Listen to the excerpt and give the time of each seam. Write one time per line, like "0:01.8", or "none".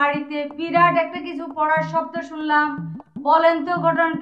none

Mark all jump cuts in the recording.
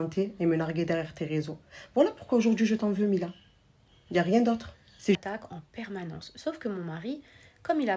0:03.3
0:05.2

